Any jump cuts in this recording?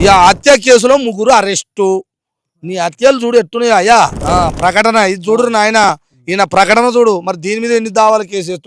yes; 1 cut; at 4.2 s

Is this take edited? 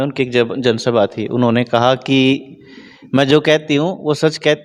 no; 0 cuts

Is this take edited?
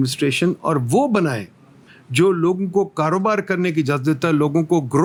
no; 0 cuts

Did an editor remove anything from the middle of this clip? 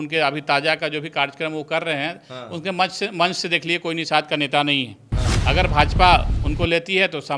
no; 0 cuts

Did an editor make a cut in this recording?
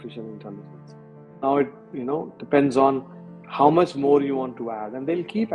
yes; 1 cut; at 1.8 s

